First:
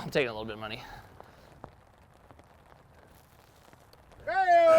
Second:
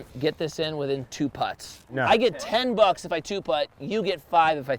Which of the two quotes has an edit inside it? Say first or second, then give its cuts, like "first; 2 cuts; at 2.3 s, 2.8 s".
first; 1 cut; at 1.3 s